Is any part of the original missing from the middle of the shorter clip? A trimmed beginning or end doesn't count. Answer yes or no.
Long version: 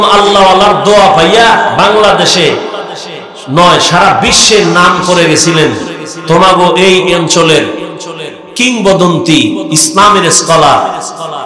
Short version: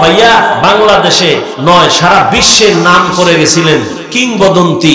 yes